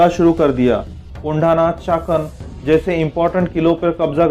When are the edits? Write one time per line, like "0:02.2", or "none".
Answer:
0:01.1